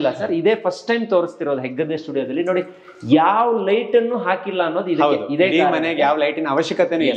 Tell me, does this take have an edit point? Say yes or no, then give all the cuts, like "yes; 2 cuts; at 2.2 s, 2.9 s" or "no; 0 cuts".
no; 0 cuts